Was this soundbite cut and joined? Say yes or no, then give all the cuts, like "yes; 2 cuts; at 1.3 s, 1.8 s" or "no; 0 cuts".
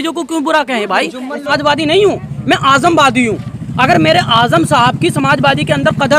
yes; 1 cut; at 1.5 s